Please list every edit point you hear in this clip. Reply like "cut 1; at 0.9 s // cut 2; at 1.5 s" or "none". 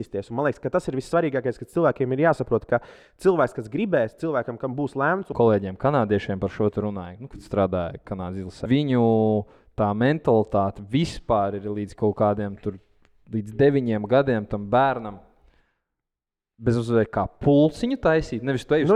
cut 1; at 5.3 s // cut 2; at 8.6 s